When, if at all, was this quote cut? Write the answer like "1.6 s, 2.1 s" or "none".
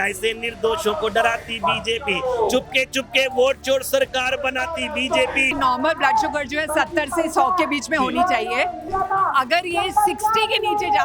5.5 s, 8.8 s